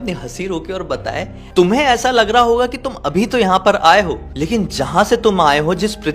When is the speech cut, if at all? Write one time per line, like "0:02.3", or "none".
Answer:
0:01.4